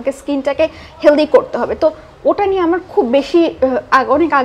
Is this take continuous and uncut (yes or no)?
yes